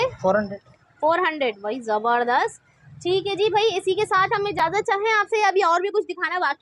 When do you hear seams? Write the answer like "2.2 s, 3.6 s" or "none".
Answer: none